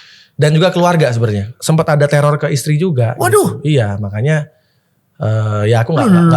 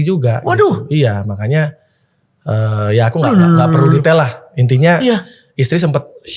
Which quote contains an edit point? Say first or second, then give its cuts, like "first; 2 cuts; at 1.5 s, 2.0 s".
first; 1 cut; at 1.5 s